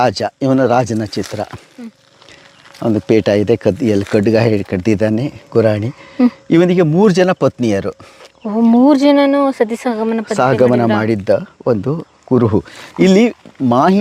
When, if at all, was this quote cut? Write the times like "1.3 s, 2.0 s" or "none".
none